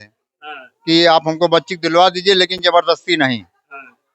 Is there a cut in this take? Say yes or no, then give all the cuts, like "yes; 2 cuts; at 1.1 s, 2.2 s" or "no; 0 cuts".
no; 0 cuts